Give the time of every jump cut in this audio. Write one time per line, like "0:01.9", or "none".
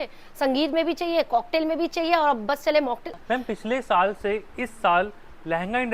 0:03.1